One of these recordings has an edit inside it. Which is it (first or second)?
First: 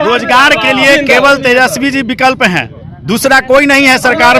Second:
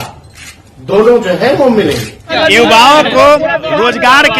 second